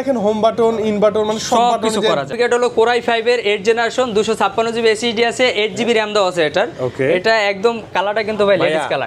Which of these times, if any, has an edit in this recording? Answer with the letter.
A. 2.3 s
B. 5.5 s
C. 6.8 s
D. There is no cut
A